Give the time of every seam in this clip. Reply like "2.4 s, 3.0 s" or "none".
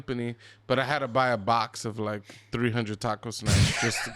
none